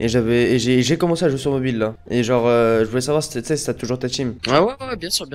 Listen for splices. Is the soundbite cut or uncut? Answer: cut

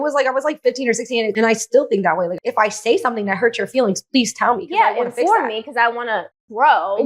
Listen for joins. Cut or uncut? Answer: cut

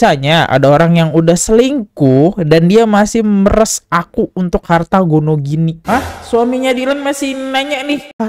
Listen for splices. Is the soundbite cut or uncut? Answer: uncut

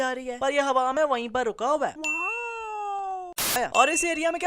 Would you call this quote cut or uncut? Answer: cut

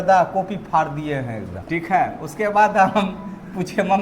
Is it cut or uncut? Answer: cut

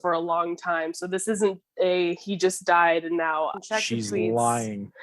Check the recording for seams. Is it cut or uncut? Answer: cut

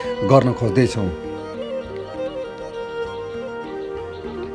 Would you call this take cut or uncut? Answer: cut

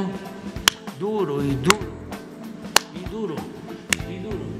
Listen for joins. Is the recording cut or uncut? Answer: uncut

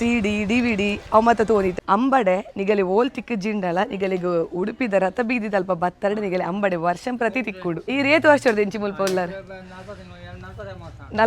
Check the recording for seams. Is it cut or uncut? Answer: cut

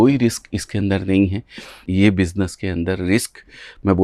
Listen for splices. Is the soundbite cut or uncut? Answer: cut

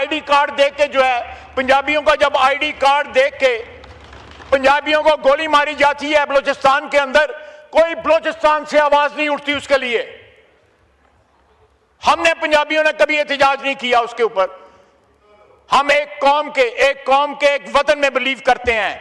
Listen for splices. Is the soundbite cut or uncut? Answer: uncut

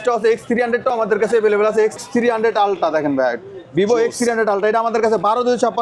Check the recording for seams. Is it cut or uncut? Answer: cut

